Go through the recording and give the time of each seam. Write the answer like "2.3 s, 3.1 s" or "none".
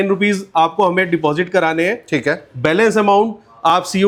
none